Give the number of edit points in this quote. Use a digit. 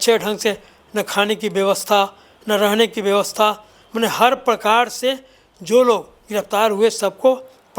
0